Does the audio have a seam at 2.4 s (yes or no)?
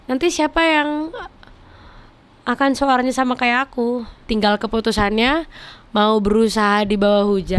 no